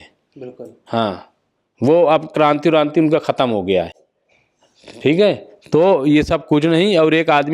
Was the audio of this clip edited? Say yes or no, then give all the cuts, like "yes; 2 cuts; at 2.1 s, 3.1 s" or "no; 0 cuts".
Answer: no; 0 cuts